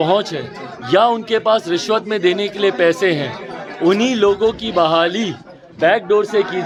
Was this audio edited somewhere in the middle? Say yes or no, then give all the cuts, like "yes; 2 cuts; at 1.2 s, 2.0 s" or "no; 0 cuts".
no; 0 cuts